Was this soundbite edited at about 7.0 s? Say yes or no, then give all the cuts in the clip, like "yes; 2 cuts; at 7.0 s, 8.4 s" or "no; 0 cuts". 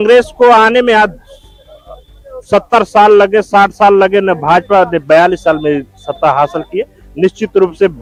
no; 0 cuts